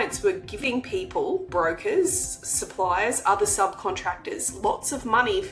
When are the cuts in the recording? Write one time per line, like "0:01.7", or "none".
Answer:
none

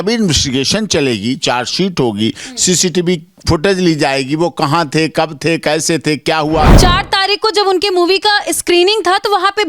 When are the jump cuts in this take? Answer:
0:06.7

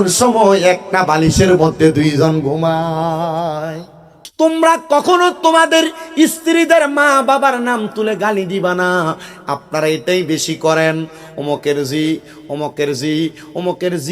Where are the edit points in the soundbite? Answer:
0:04.2

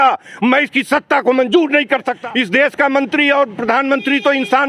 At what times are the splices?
0:02.1

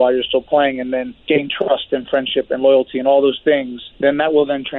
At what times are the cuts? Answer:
0:01.1
0:03.8

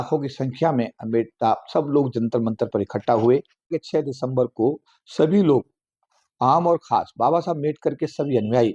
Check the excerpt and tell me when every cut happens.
0:03.8

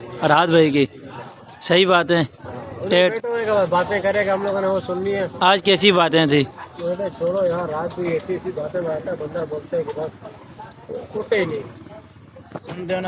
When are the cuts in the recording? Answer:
none

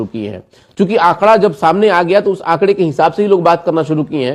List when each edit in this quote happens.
none

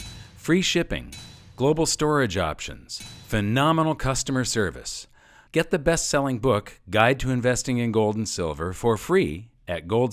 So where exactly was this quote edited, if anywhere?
none

